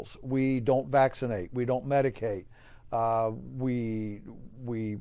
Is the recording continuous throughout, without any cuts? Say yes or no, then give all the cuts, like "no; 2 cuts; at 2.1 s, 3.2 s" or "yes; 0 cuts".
yes; 0 cuts